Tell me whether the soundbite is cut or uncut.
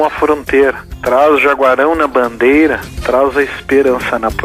cut